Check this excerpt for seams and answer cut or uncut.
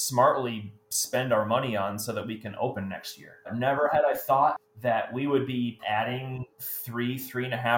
cut